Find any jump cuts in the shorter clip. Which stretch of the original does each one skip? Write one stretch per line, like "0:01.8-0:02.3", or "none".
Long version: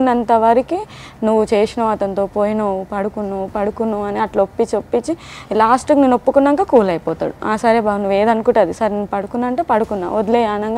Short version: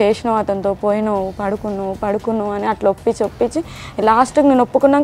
none